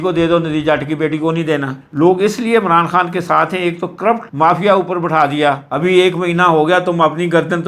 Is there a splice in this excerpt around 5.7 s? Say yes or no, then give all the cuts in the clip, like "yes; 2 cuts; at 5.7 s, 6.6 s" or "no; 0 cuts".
yes; 2 cuts; at 1.8 s, 5.7 s